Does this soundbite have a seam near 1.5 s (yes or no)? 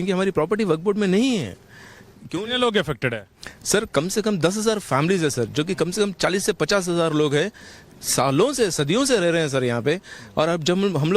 no